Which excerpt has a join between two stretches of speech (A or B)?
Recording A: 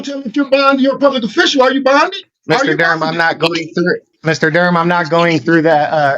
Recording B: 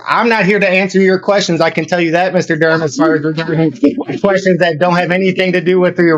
A